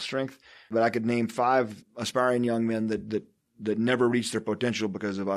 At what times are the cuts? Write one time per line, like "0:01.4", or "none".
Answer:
0:00.7
0:01.8